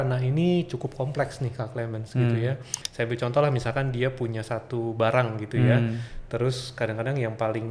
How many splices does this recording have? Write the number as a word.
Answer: one